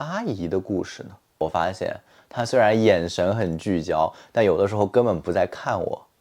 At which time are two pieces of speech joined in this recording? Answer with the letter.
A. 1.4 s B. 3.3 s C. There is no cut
A